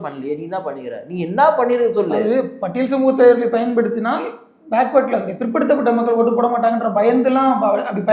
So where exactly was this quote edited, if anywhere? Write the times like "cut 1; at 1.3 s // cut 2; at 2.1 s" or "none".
none